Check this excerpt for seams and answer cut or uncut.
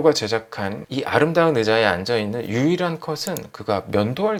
uncut